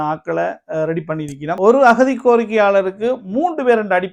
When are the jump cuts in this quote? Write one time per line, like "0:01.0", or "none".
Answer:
0:01.6